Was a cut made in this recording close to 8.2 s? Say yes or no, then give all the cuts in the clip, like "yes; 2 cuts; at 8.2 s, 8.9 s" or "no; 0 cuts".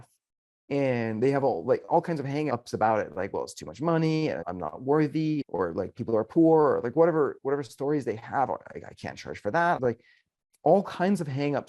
no; 4 cuts; at 2.5 s, 4.5 s, 5.5 s, 9.8 s